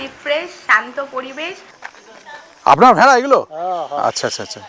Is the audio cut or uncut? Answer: cut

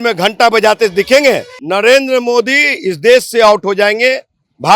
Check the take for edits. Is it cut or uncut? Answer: cut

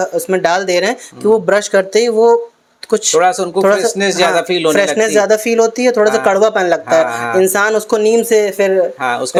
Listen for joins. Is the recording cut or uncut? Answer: uncut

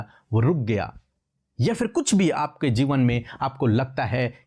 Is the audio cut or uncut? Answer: uncut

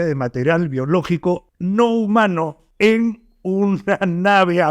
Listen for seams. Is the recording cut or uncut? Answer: cut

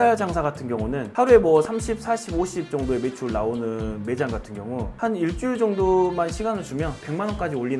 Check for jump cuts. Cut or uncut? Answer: uncut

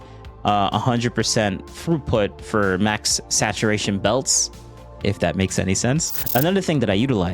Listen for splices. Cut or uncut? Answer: cut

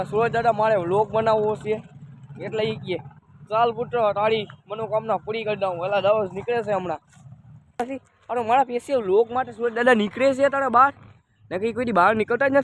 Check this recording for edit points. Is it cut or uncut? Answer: cut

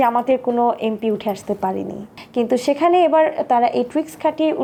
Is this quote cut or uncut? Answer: uncut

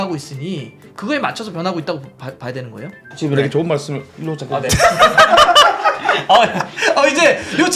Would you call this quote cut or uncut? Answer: cut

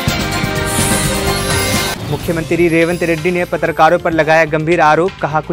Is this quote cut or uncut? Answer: uncut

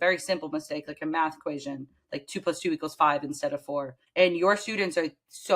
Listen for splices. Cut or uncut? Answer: cut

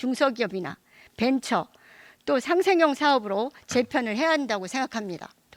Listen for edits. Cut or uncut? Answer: uncut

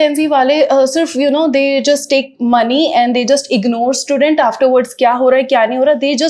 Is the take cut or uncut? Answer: uncut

